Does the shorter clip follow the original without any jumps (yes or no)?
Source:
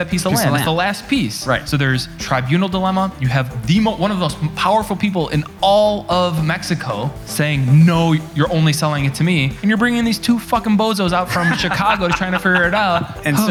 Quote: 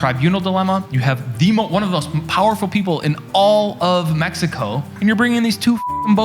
no